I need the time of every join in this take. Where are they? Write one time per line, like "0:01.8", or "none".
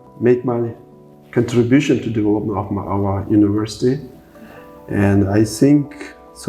none

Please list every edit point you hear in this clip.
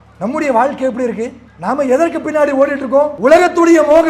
0:01.4
0:03.1

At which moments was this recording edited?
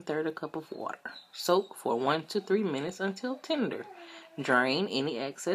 0:04.3

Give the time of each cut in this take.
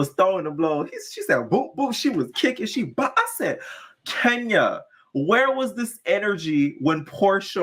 none

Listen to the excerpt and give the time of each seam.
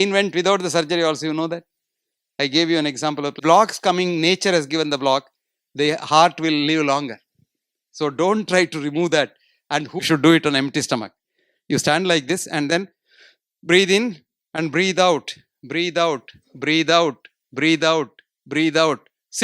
0:03.4
0:10.0

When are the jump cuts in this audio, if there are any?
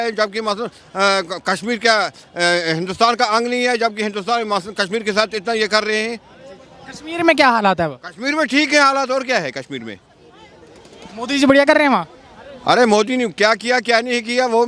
none

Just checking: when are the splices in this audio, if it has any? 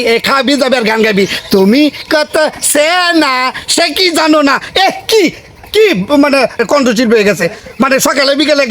0:06.5

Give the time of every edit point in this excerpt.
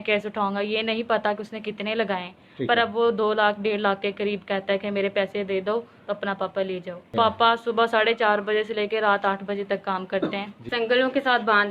0:07.1
0:10.6

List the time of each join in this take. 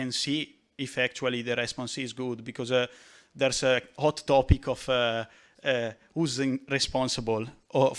none

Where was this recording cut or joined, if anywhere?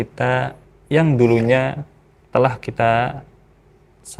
none

